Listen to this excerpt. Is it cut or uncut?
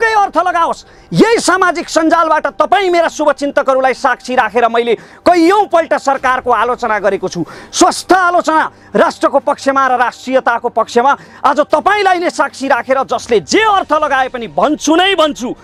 uncut